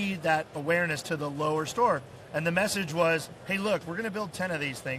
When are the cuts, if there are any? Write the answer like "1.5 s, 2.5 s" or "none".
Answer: none